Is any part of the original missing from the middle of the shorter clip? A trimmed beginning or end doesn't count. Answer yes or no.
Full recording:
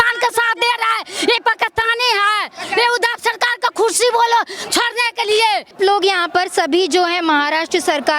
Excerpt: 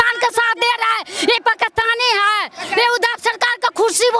no